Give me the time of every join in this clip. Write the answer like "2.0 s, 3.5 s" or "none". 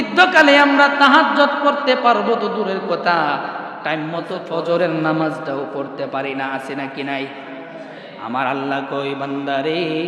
4.4 s